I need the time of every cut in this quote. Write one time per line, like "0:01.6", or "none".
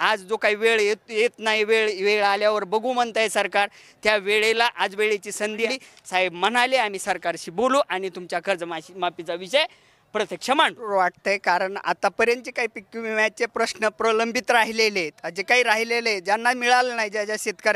0:05.7
0:10.8